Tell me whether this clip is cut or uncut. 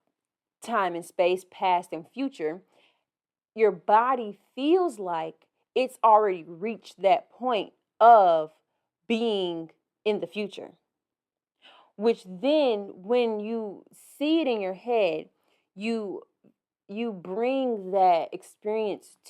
uncut